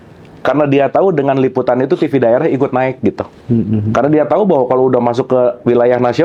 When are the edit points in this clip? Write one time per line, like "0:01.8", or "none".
none